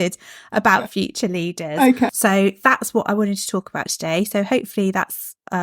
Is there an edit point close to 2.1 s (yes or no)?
yes